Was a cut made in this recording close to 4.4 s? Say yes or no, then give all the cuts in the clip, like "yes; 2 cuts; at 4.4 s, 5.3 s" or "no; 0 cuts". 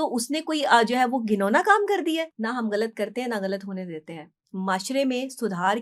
no; 1 cut; at 2.3 s